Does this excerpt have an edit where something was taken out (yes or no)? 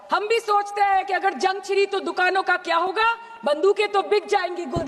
no